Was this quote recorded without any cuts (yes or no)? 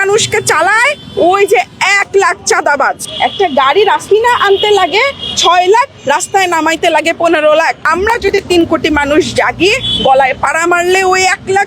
no